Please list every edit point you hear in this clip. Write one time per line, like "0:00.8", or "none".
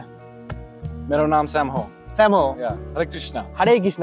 none